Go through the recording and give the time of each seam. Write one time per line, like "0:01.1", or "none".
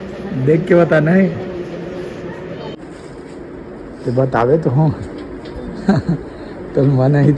0:02.8

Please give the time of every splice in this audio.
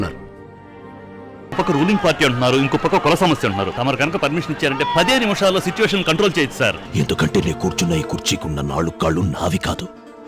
0:01.6
0:03.7
0:06.8

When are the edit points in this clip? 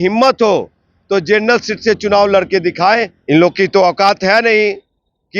0:03.1

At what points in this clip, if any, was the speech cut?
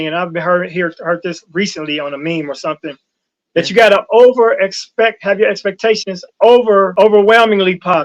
0:06.9

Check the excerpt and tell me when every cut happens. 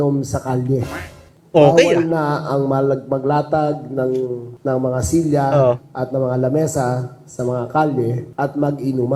none

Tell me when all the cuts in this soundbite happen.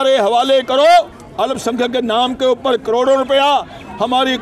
0:01.2

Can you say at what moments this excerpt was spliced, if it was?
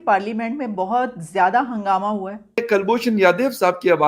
0:02.6

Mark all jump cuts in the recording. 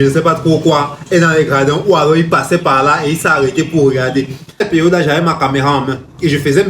0:04.7

